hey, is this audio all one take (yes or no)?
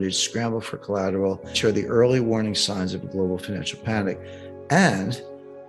no